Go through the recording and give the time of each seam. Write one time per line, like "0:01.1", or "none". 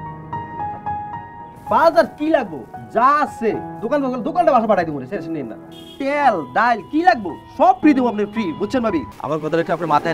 0:09.1